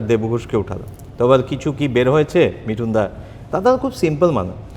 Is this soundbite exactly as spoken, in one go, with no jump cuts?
yes; 0 cuts

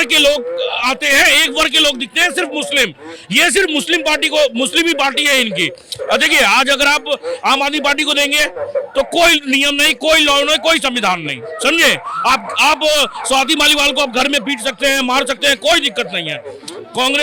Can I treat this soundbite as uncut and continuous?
yes; 0 cuts

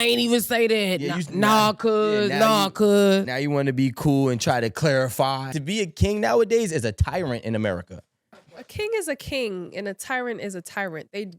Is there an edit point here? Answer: yes; 1 cut; at 5.5 s

